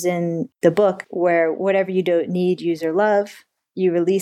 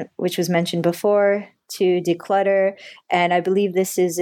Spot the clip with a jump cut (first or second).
first